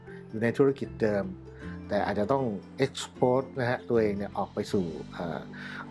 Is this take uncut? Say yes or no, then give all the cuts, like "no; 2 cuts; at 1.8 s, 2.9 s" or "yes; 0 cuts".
yes; 0 cuts